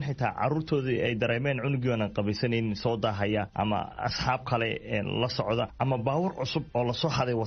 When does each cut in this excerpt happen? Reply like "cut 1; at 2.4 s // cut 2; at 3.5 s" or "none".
cut 1; at 3.7 s // cut 2; at 5.7 s // cut 3; at 6.7 s